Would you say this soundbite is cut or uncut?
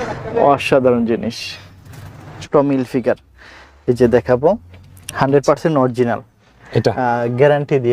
cut